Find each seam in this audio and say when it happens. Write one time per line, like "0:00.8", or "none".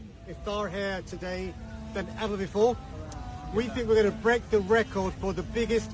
none